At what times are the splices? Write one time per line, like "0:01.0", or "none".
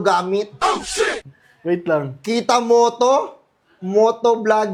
none